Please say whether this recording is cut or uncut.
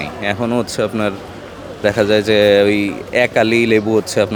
uncut